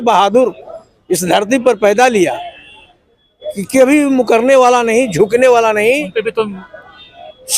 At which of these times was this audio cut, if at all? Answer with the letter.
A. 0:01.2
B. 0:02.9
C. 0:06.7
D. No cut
C